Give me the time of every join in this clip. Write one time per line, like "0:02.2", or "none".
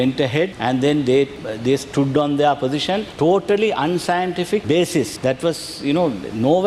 none

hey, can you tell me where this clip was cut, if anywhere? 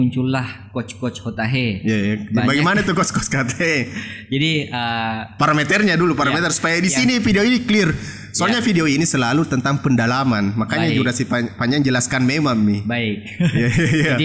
none

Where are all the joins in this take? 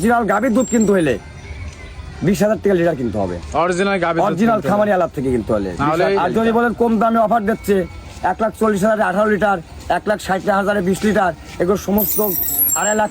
0:06.2

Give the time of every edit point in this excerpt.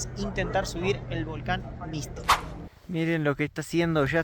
0:02.4

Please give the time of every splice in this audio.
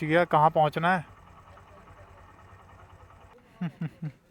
0:03.3

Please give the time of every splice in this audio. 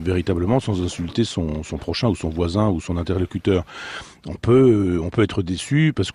0:01.5

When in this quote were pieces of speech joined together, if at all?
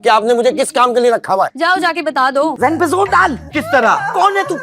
0:02.5

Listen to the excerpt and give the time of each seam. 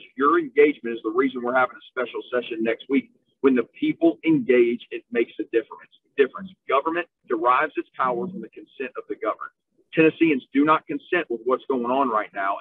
none

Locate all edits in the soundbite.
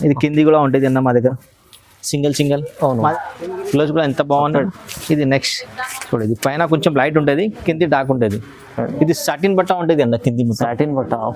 0:03.1

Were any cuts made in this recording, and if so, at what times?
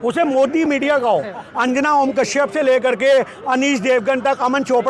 none

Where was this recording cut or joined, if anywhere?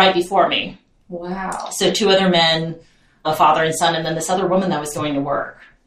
0:03.2

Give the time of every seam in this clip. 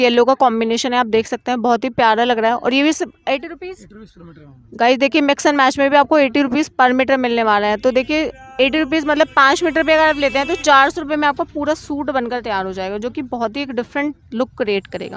none

